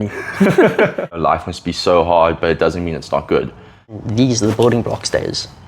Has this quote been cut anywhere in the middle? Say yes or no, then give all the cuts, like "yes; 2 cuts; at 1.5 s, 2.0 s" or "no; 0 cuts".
yes; 2 cuts; at 1.2 s, 3.8 s